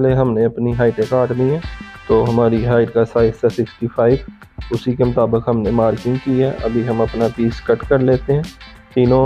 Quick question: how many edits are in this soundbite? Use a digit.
0